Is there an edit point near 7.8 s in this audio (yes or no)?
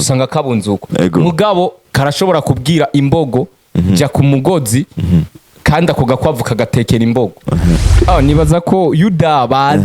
yes